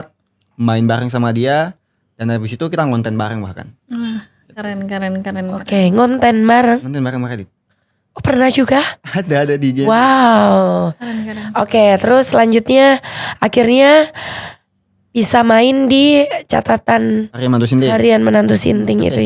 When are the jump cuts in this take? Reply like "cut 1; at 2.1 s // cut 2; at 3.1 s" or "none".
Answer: none